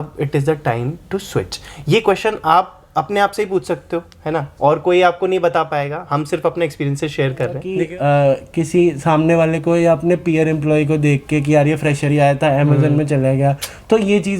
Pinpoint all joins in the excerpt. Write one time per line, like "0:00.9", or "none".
0:07.6